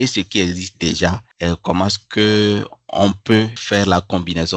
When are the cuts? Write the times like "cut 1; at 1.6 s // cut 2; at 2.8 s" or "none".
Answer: cut 1; at 1.3 s // cut 2; at 3.6 s